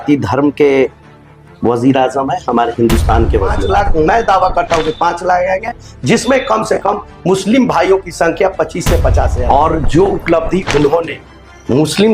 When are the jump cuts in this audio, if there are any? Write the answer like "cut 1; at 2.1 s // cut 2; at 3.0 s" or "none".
cut 1; at 3.6 s // cut 2; at 9.3 s